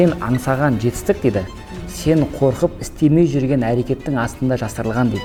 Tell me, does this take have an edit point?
no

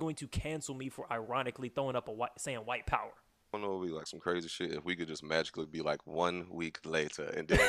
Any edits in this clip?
yes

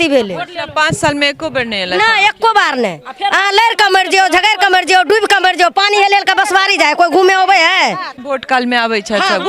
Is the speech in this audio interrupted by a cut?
yes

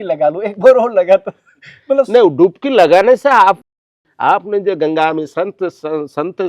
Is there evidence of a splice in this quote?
yes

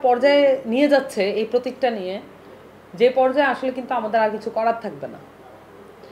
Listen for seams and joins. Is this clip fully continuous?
yes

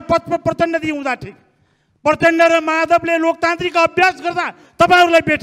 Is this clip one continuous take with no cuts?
yes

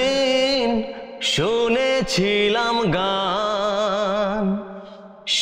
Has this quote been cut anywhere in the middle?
no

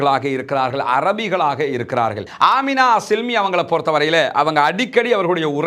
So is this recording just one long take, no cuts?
no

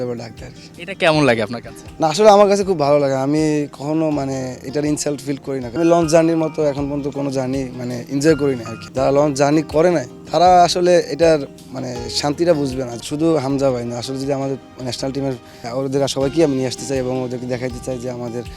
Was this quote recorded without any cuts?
no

